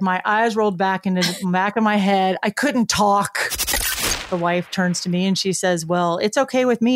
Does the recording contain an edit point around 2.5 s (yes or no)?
no